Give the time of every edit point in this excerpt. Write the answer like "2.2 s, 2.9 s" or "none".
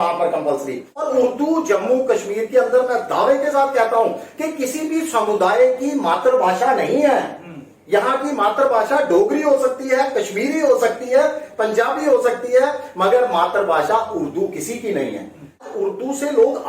0.9 s, 15.7 s